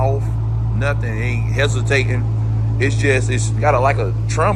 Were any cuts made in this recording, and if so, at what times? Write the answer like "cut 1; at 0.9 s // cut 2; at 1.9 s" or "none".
none